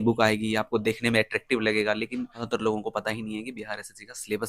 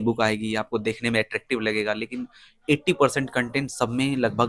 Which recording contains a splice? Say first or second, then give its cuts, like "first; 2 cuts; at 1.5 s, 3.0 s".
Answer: first; 1 cut; at 2.4 s